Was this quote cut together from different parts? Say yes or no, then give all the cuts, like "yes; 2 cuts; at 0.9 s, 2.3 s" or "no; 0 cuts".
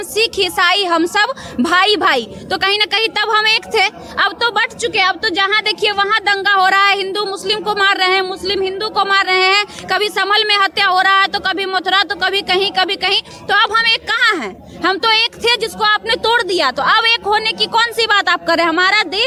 no; 0 cuts